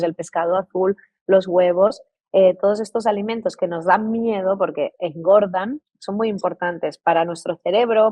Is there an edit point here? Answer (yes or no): no